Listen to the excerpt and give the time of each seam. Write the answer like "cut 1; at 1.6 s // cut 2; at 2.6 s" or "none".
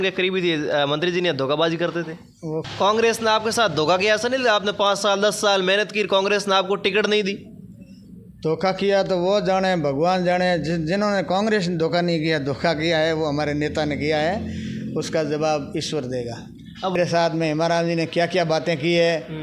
cut 1; at 2.7 s // cut 2; at 17.0 s

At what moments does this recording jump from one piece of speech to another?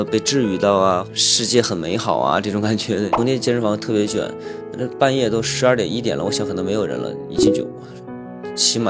cut 1; at 3.1 s

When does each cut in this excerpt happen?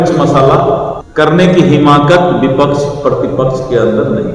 cut 1; at 1.0 s

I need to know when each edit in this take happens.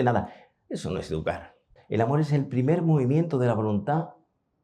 cut 1; at 1.7 s

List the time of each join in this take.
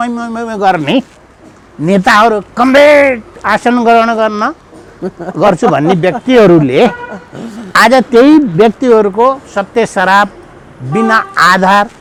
none

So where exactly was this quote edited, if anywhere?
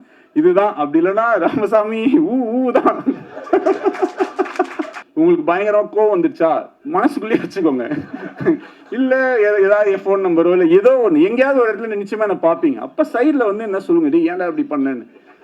cut 1; at 5.0 s

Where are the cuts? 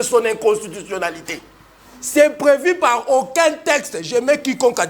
none

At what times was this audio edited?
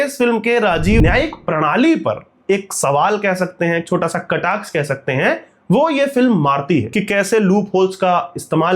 cut 1; at 1.0 s // cut 2; at 6.9 s

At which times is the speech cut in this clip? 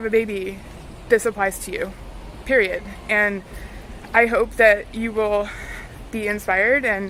none

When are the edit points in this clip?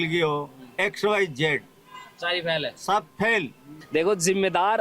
cut 1; at 3.7 s

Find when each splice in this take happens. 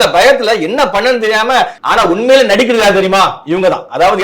cut 1; at 1.8 s

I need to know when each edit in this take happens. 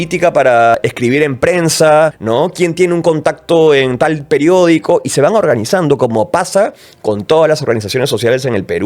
cut 1; at 0.7 s // cut 2; at 2.2 s

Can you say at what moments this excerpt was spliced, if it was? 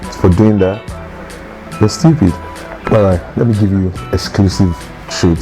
cut 1; at 2.5 s

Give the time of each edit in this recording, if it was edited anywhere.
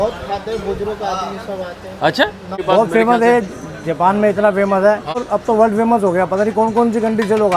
cut 1; at 2.6 s // cut 2; at 5.2 s

